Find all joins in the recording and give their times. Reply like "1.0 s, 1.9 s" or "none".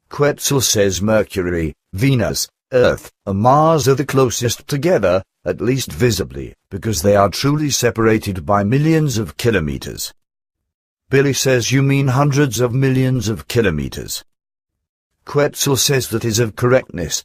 0.9 s, 2.0 s

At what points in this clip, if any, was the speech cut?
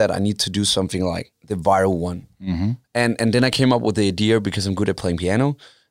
1.3 s

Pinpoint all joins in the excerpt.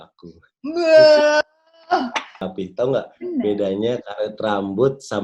2.5 s

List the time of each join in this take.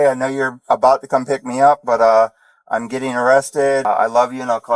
3.8 s

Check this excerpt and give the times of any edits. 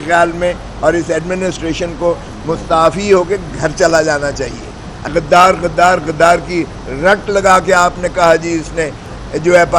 5.1 s

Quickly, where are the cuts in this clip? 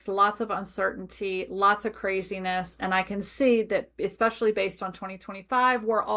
none

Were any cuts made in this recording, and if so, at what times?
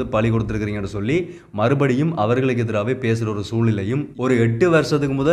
4.1 s

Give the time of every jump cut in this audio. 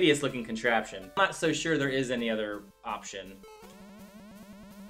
1.2 s

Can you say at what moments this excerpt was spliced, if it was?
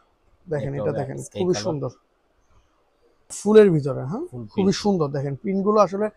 3.4 s

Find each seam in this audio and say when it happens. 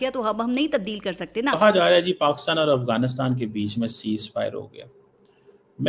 1.5 s

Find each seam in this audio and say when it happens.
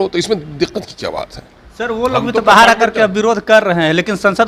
none

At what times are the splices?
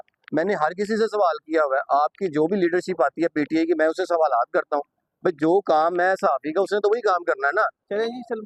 none

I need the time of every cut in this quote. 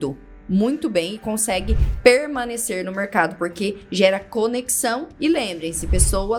none

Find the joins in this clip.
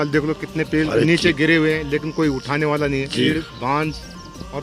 0.9 s, 3.2 s

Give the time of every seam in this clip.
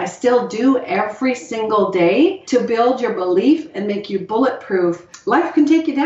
2.4 s, 5.1 s

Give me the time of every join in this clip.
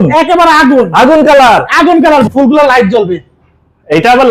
2.3 s

